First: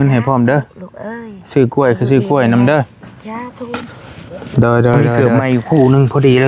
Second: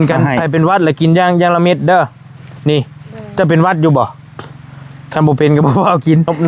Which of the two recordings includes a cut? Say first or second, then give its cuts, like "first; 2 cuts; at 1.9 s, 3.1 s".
first; 1 cut; at 5.2 s